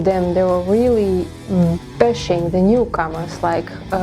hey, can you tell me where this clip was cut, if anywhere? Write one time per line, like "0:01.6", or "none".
0:01.8